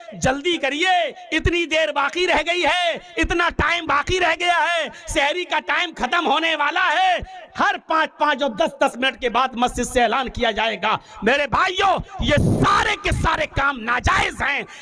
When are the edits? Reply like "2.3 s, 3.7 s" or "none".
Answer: none